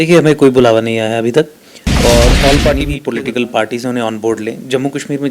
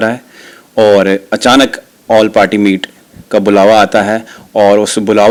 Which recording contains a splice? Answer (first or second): first